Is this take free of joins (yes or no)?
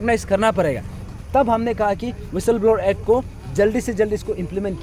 yes